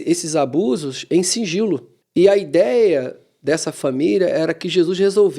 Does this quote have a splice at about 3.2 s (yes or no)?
no